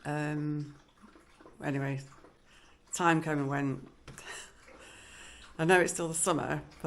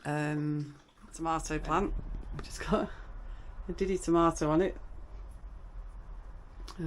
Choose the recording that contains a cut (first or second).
second